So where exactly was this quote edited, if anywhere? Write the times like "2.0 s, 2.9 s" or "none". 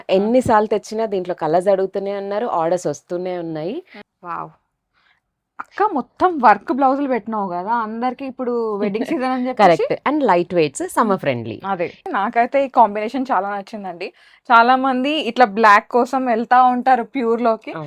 4.0 s, 12.0 s